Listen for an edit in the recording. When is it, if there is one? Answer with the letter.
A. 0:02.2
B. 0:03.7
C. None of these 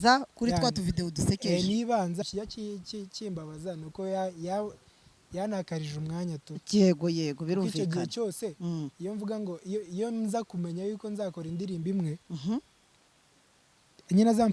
A